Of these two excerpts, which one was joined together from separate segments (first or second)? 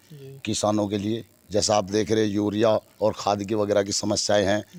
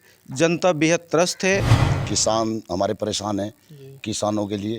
second